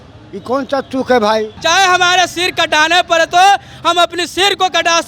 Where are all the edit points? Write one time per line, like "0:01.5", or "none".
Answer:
0:01.5